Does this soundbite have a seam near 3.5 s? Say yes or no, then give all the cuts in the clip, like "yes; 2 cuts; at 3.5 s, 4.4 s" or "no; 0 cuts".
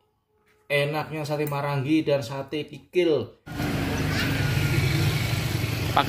yes; 1 cut; at 3.5 s